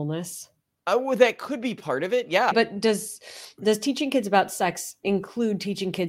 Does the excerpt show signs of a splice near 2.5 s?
yes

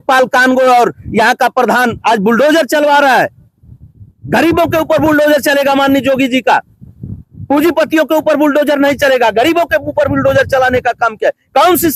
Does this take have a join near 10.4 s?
no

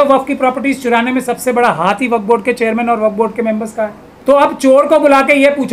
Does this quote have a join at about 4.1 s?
yes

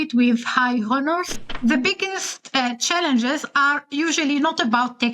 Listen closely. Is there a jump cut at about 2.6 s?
no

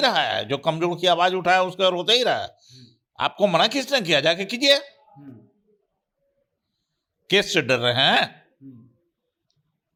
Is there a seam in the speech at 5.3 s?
no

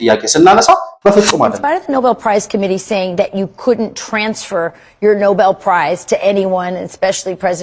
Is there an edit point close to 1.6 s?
yes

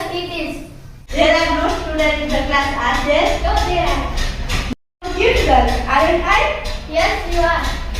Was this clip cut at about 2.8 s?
no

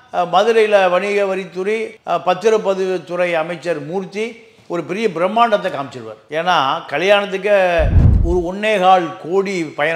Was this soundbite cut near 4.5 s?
no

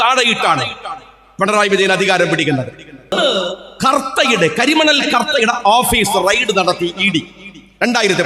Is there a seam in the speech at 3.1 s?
yes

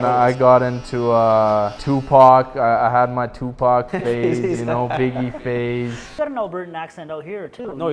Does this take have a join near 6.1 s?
yes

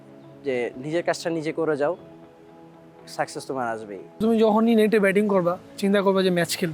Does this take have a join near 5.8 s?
no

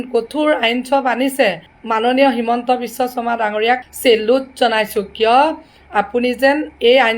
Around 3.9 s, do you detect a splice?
yes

